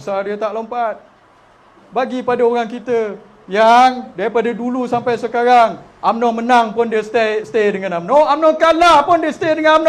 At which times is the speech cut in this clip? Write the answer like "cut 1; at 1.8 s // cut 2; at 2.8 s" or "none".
none